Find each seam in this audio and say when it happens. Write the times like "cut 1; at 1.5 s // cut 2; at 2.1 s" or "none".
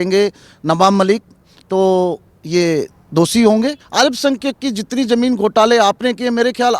cut 1; at 3.8 s